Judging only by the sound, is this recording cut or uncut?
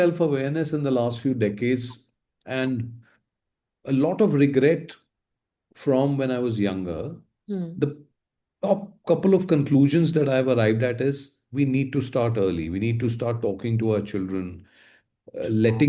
uncut